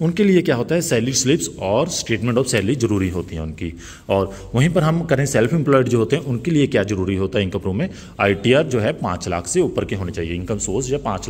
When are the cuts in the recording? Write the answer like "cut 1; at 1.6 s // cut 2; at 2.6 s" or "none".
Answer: none